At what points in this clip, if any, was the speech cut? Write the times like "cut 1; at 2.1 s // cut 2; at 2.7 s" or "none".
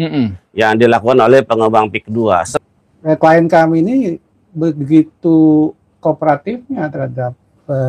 cut 1; at 2.5 s